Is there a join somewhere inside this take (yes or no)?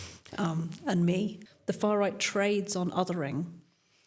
yes